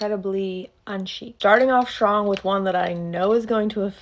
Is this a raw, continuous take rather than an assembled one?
no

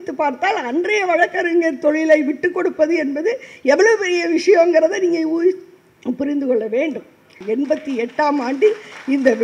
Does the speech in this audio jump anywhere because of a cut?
yes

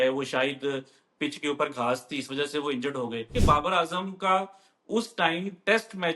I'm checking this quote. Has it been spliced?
yes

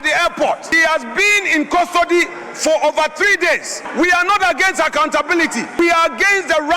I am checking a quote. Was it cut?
yes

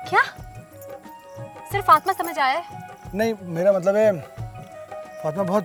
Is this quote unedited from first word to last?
yes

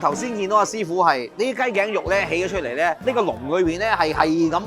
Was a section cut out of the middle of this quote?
yes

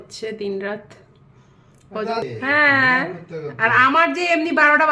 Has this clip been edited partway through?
yes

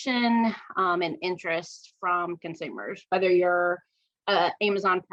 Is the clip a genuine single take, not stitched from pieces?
yes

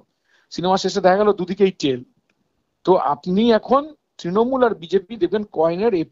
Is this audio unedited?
yes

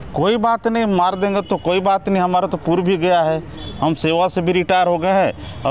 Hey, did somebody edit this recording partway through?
no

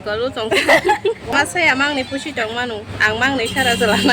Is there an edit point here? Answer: yes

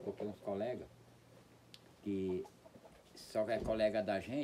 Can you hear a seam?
no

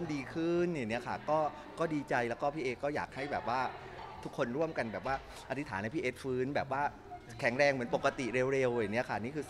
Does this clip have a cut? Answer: no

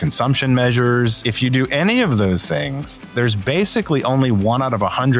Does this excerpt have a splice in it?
yes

